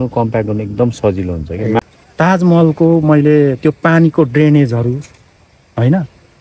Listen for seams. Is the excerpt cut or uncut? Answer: cut